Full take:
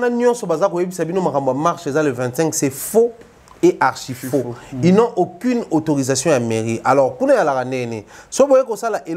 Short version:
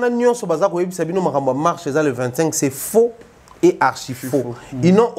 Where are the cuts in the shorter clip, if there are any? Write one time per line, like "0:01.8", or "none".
none